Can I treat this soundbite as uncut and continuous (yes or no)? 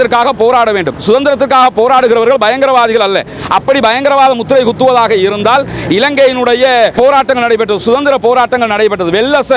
yes